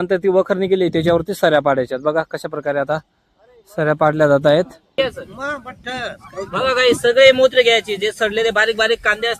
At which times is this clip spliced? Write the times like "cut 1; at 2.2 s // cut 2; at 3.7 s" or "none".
cut 1; at 5.0 s